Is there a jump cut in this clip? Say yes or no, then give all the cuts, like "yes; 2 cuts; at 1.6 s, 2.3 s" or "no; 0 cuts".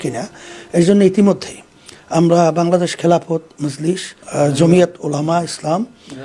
no; 0 cuts